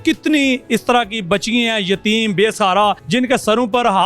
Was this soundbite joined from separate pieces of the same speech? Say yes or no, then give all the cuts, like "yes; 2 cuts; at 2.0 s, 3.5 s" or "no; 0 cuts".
yes; 1 cut; at 3.0 s